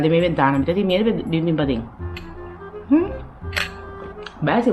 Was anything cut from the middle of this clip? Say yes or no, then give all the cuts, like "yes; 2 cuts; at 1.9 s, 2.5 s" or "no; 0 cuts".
no; 0 cuts